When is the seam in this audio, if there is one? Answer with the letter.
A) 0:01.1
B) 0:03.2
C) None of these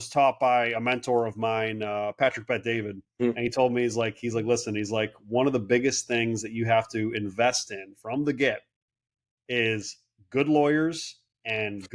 B